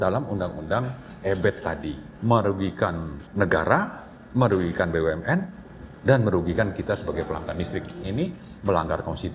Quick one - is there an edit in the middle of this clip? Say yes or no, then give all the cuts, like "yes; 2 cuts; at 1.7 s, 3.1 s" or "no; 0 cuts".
yes; 3 cuts; at 2.1 s, 3.2 s, 8.1 s